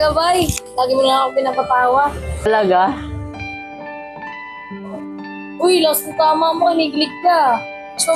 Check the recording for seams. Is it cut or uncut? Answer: uncut